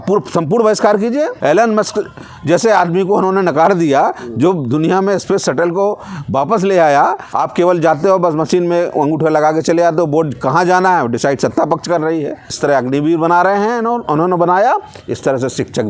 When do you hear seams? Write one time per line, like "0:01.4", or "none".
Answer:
0:01.3
0:07.2
0:12.5